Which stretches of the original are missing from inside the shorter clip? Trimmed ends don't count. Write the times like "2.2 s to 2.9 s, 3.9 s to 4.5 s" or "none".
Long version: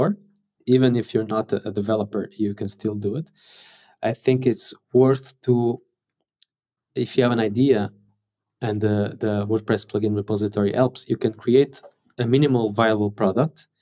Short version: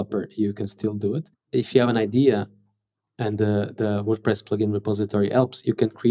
3.3 s to 6.8 s